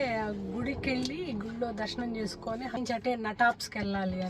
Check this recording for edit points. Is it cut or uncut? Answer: cut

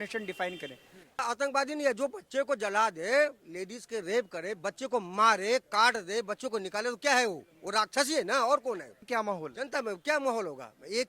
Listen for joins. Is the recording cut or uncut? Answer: cut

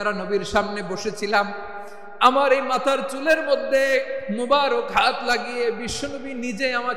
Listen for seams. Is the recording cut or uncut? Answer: uncut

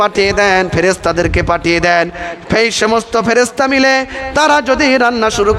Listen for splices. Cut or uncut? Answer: uncut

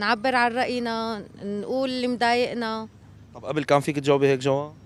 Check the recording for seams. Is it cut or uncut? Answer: uncut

